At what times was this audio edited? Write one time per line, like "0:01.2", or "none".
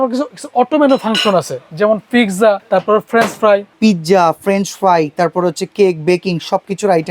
0:02.6
0:03.7